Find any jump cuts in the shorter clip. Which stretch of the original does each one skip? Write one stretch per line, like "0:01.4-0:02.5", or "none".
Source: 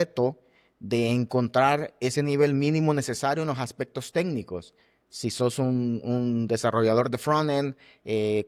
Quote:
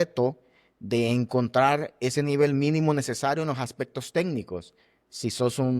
none